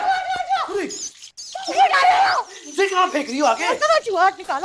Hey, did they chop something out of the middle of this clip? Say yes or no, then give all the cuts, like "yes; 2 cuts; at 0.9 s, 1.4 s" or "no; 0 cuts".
no; 0 cuts